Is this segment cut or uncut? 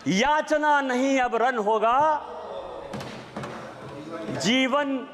uncut